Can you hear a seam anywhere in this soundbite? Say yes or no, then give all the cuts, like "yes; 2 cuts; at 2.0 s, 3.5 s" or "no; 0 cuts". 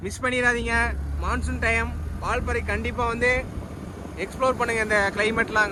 no; 0 cuts